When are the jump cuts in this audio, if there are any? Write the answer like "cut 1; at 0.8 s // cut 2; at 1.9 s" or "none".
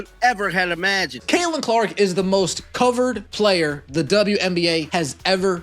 cut 1; at 1.1 s // cut 2; at 3.2 s // cut 3; at 4.9 s